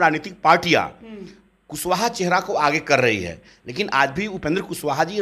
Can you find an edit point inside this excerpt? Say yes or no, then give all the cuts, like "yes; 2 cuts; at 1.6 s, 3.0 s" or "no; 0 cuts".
no; 0 cuts